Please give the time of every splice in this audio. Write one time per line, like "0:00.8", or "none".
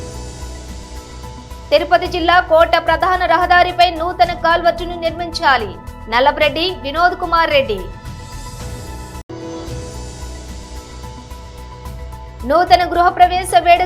0:01.7
0:08.1
0:12.4